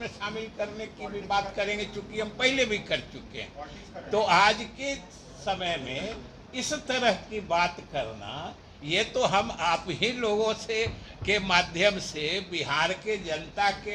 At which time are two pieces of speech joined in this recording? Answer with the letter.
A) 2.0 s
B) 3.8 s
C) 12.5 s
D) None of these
D